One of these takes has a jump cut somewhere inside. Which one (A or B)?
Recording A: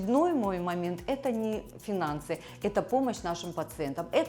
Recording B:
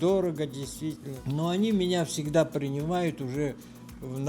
B